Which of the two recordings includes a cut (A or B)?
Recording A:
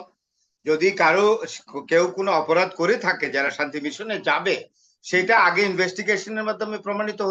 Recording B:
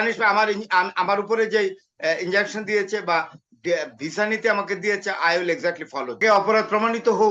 B